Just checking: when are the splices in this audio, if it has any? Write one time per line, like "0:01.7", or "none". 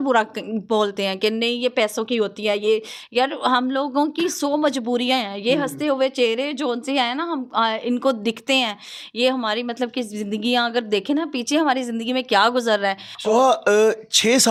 none